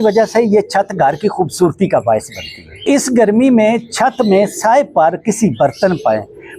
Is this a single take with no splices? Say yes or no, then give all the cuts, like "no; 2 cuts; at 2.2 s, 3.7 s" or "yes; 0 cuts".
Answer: no; 1 cut; at 2.8 s